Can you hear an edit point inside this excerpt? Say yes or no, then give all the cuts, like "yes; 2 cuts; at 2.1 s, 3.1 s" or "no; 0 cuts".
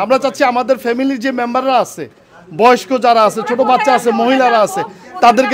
no; 0 cuts